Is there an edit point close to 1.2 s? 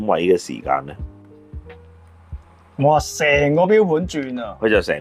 no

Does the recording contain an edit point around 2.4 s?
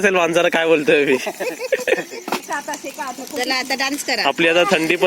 yes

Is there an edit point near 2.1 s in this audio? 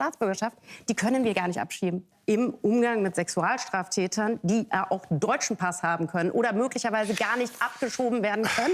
yes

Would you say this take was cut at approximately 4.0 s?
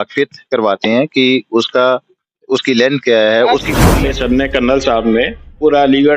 yes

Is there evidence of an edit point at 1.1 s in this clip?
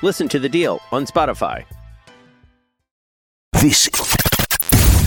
no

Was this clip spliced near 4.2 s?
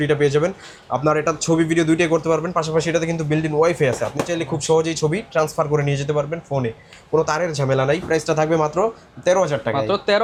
no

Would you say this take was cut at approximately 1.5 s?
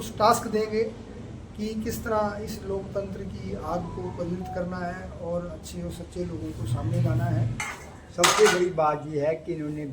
no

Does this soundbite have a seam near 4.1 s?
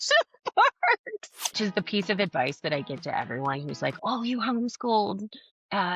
no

